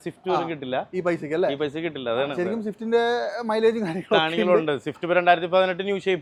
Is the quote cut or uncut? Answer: uncut